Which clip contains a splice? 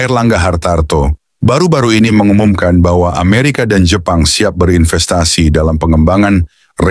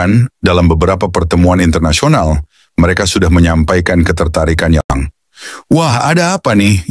second; 1 cut; at 4.9 s

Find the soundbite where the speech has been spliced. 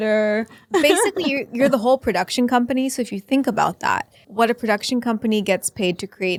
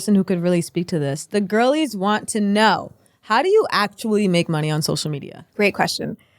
second; 1 cut; at 5.4 s

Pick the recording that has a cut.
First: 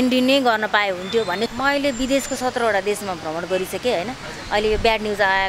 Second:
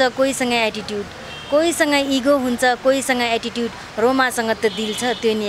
first; 1 cut; at 1.5 s

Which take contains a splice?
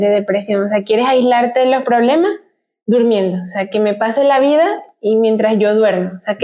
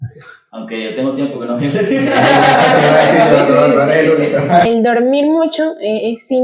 second; 1 cut; at 4.7 s

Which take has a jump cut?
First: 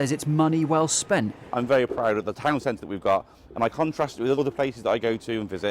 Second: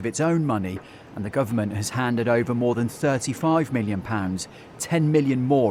first; 2 cuts; at 1.4 s, 4.4 s

